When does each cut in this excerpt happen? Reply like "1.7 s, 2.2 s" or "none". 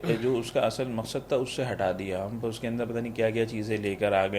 none